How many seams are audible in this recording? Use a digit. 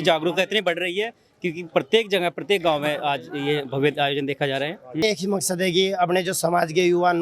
1